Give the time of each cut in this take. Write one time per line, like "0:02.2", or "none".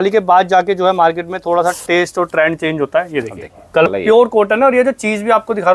0:03.9